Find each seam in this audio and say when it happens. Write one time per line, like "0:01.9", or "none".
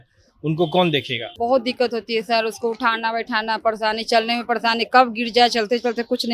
0:01.2